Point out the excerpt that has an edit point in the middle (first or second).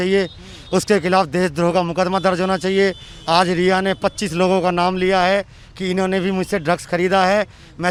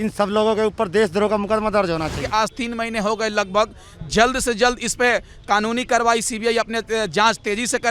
second